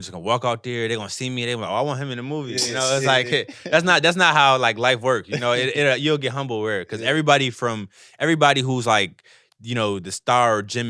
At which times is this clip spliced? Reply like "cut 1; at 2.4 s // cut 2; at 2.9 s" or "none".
none